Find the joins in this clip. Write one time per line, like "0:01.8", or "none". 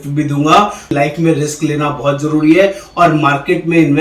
0:00.9